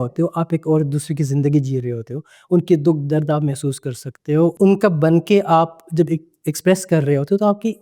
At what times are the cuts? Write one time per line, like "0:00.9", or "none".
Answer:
0:04.5